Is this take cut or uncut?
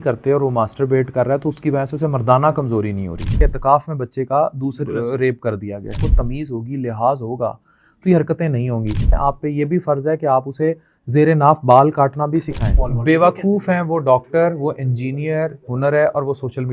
cut